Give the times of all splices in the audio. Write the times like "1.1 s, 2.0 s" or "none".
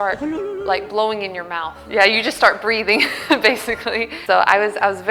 4.1 s